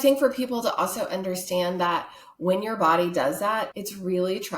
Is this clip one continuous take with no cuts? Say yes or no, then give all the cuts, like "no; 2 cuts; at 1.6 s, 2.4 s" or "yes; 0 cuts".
no; 1 cut; at 3.7 s